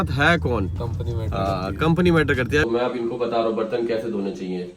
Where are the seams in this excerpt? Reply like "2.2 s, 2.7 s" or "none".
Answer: 2.6 s